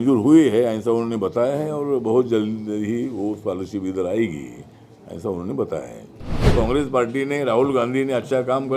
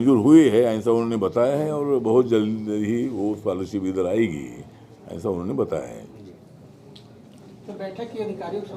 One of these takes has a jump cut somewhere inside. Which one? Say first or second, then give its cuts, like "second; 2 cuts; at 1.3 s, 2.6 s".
first; 1 cut; at 6.4 s